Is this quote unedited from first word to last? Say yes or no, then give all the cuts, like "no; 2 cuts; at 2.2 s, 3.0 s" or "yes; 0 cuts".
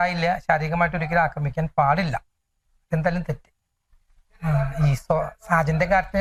yes; 0 cuts